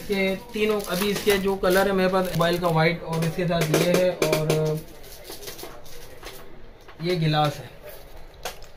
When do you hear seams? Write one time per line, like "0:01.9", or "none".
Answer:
0:02.4